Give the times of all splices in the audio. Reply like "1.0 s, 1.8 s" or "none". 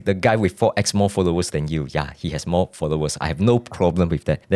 none

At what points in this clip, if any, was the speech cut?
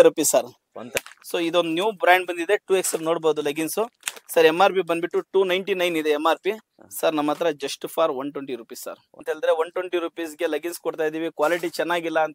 1.0 s, 9.2 s

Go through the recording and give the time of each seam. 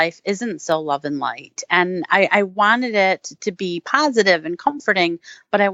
none

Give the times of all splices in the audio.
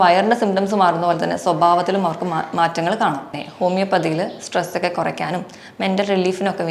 3.4 s

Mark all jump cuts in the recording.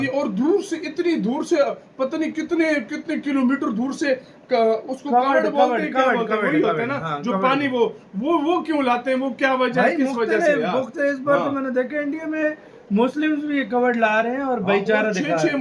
none

